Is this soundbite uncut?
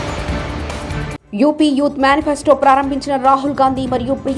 no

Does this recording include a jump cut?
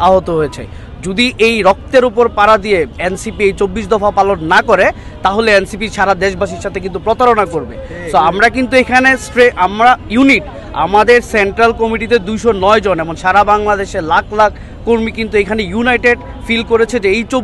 no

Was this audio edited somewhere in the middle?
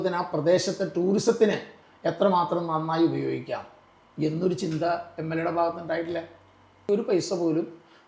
yes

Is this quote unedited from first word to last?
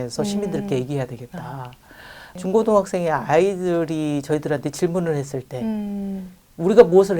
no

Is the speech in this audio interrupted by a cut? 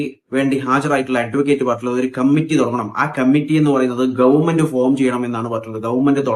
no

